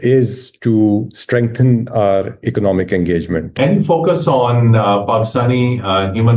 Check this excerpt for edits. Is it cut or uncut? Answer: cut